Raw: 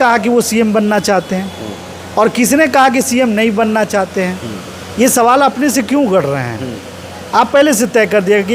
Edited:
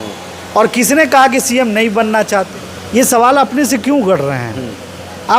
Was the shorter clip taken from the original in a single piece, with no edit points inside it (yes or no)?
no